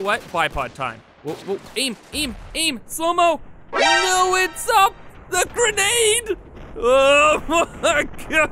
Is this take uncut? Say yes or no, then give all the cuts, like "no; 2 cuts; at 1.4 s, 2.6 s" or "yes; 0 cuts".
no; 1 cut; at 1.1 s